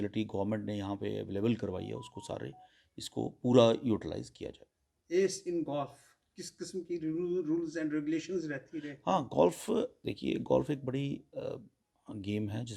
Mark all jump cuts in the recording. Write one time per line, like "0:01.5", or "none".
none